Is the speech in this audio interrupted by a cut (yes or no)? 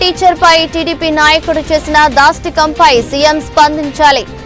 no